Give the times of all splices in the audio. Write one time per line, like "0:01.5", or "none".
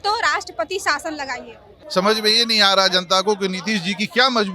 0:01.8